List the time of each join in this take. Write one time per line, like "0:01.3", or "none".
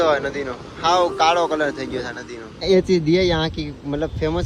0:02.6